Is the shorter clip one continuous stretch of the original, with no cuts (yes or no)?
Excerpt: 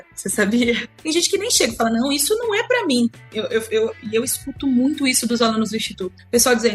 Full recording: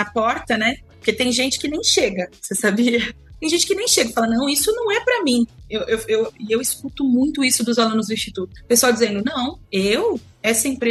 no